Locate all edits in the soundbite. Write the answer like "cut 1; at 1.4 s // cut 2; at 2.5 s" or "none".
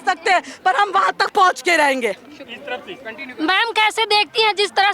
none